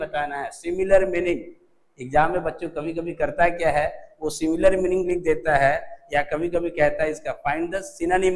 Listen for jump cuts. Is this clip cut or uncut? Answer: uncut